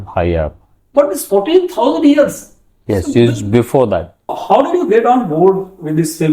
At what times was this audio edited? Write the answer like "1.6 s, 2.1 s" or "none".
4.4 s

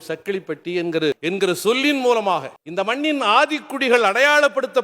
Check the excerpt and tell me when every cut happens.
1.2 s, 2.6 s

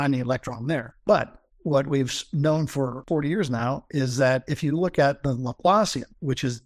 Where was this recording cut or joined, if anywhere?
3.0 s

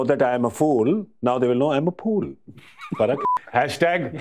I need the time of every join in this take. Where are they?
3.2 s

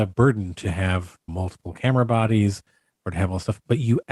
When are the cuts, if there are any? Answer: none

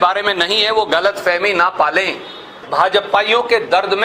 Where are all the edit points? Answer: 2.6 s

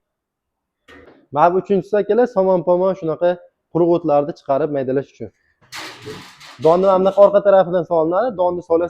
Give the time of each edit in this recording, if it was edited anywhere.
1.0 s, 5.5 s

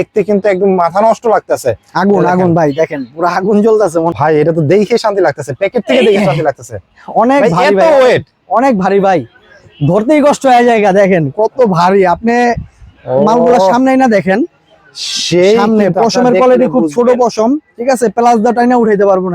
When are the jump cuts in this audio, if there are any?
4.1 s

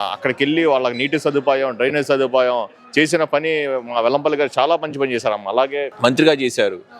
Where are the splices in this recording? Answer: 5.9 s

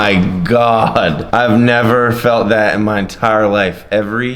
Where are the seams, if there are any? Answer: 1.2 s

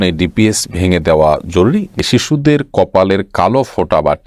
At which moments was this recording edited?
2.0 s

